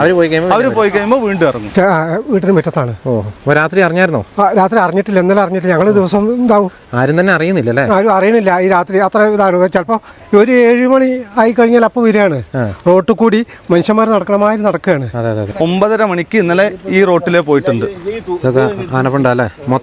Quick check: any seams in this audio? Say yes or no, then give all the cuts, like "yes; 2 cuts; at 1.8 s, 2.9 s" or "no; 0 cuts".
yes; 2 cuts; at 1.6 s, 15.5 s